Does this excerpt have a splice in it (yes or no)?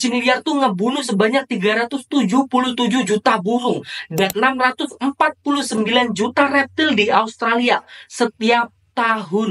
no